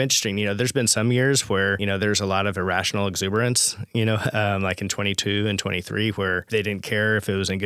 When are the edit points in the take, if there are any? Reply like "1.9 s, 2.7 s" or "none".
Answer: 1.8 s, 6.4 s